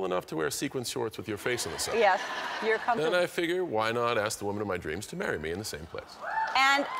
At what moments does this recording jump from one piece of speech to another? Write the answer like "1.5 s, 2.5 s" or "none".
1.3 s